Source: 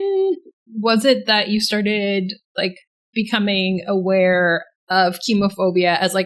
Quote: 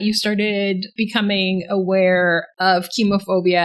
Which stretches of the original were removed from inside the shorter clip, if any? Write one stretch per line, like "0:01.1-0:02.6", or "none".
0:02.3-0:03.0
0:04.7-0:04.8